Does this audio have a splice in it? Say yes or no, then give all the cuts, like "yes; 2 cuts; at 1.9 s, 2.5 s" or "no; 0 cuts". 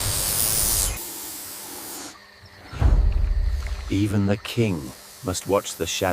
yes; 1 cut; at 1.0 s